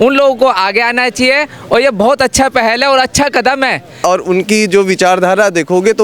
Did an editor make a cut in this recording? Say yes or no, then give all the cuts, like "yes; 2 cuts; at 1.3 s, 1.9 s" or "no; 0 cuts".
yes; 1 cut; at 4.0 s